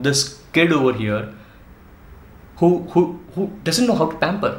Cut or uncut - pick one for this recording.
uncut